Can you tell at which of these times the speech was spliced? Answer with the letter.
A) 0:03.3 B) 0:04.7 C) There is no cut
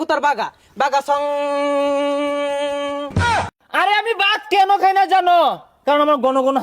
A